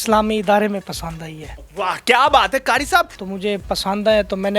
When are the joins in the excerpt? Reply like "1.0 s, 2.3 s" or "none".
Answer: 3.2 s